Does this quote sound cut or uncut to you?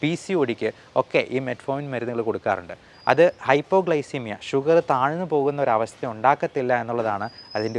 uncut